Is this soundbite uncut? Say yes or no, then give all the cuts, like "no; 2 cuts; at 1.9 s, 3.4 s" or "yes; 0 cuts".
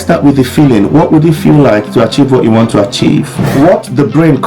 no; 1 cut; at 3.4 s